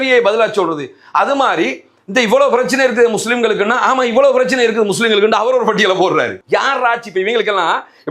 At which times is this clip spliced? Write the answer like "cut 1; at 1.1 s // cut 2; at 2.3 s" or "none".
cut 1; at 6.4 s

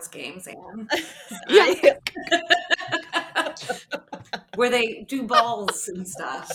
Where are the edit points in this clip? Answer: none

